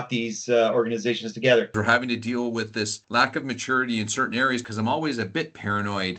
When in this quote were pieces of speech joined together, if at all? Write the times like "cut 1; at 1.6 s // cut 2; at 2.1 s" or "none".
cut 1; at 1.7 s // cut 2; at 4.6 s

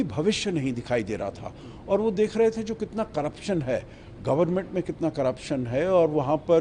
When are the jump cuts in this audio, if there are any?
none

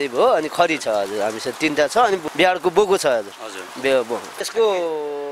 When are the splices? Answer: cut 1; at 2.2 s // cut 2; at 4.4 s

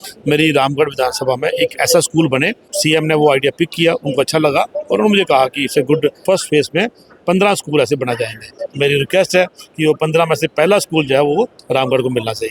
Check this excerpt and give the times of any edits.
cut 1; at 2.7 s // cut 2; at 6.2 s // cut 3; at 8.6 s

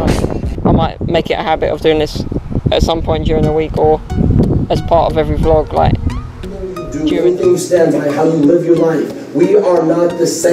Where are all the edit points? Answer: cut 1; at 6.9 s

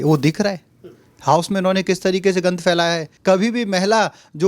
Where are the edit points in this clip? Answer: cut 1; at 3.1 s

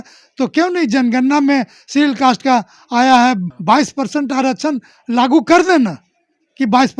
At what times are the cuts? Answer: cut 1; at 3.5 s

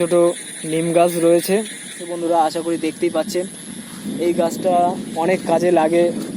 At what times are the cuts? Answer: cut 1; at 2.1 s

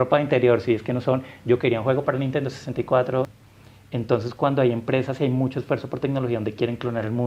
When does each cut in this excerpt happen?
cut 1; at 3.3 s

